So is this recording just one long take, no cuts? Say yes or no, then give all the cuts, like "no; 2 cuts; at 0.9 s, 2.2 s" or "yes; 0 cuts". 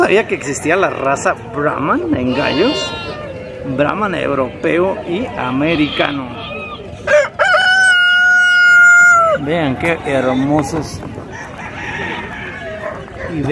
yes; 0 cuts